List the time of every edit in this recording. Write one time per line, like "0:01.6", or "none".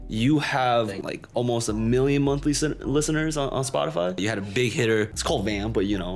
0:01.0
0:04.2
0:05.2

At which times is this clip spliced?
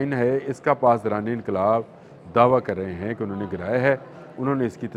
none

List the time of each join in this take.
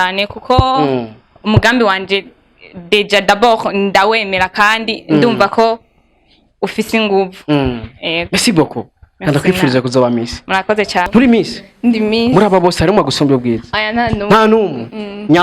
0:11.1

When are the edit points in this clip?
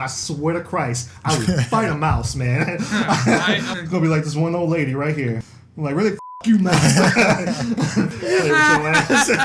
0:03.7
0:05.5
0:08.2

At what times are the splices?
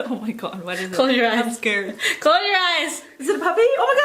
0:03.1

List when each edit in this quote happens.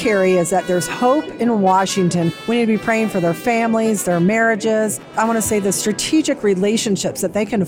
0:02.4

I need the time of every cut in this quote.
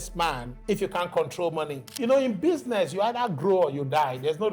0:01.9

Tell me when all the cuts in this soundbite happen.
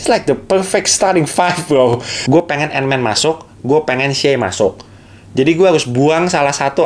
0:02.1

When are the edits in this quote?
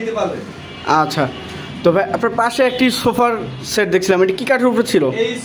none

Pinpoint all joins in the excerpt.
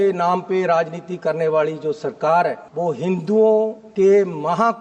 0:02.6
0:03.8

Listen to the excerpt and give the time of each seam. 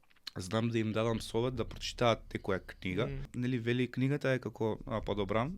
0:03.3

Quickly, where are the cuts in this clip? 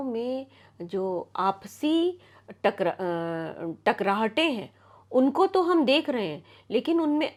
none

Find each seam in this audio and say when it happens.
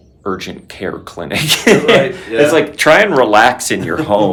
none

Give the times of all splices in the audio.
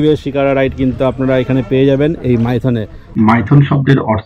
0:03.1

